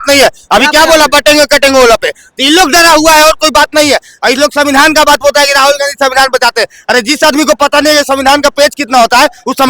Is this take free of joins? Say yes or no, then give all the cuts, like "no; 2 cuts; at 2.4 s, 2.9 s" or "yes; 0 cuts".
yes; 0 cuts